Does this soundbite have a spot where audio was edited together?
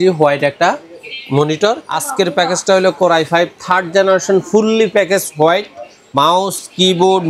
yes; 1 cut; at 2.0 s

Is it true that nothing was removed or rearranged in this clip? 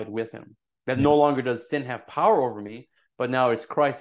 yes; 0 cuts

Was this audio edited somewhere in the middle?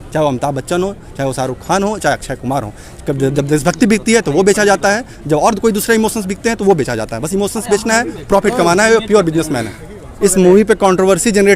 yes; 1 cut; at 10.1 s

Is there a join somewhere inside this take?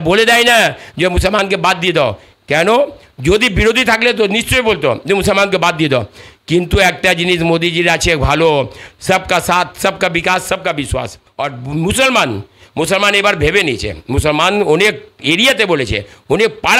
yes; 1 cut; at 11.2 s

